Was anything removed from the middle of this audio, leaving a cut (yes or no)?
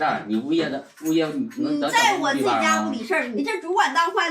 yes